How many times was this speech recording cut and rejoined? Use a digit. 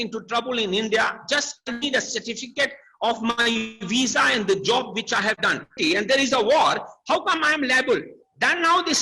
1